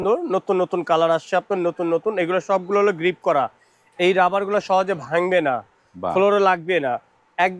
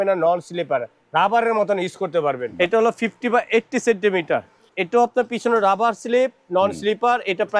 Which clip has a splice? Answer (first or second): second